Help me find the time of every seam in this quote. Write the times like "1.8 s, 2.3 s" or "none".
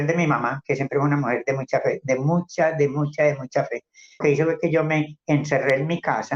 4.2 s

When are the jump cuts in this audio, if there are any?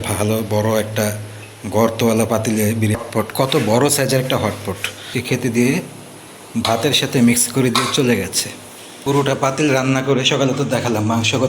3.0 s, 5.1 s, 9.0 s

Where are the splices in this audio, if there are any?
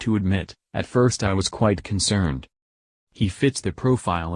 none

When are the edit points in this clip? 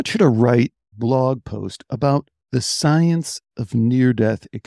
0.9 s, 2.4 s

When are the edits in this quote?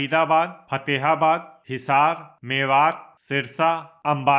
1.6 s, 2.3 s, 3.5 s

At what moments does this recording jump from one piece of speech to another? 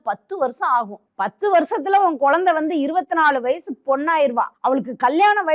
1.0 s, 4.5 s

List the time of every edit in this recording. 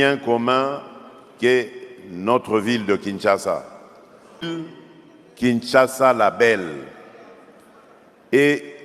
4.5 s

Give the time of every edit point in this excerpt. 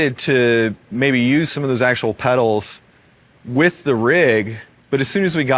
1.5 s

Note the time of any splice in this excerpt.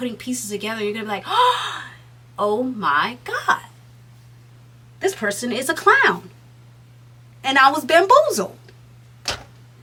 none

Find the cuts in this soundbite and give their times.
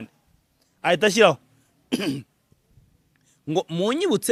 none

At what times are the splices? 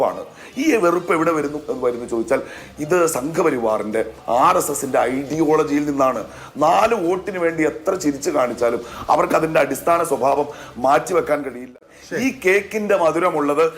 11.7 s

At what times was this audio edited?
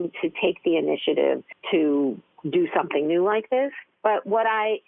1.5 s, 2.3 s, 3.9 s

